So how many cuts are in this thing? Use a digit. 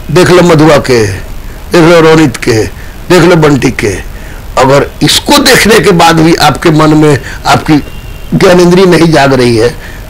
0